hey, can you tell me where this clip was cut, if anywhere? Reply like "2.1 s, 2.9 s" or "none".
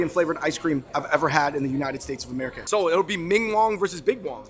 0.9 s, 2.6 s